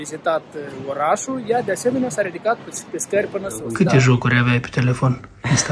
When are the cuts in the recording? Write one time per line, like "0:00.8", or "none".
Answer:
0:03.6

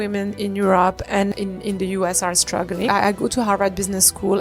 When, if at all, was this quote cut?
0:01.3
0:02.9

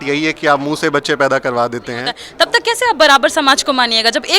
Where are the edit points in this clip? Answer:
0:02.2

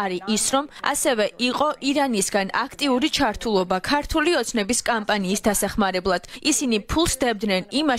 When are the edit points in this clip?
0:06.3

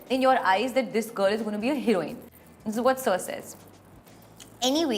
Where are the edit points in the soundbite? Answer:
none

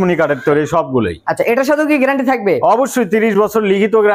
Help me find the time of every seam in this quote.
none

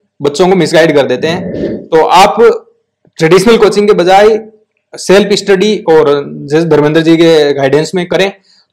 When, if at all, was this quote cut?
0:01.4

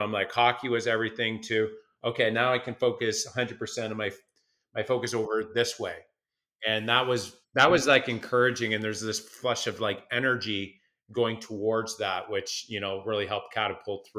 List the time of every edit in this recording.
none

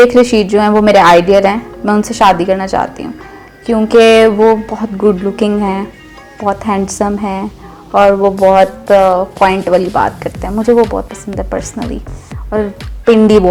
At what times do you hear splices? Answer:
none

